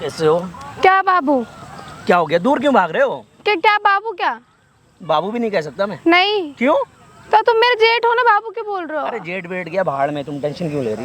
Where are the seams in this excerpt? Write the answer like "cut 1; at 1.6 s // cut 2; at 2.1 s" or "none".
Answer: none